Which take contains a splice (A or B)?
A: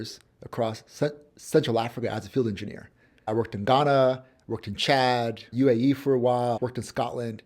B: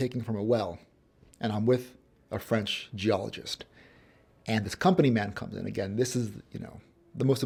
A